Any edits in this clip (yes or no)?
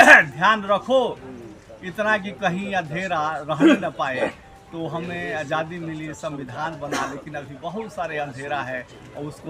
no